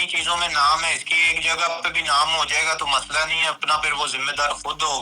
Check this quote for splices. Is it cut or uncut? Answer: uncut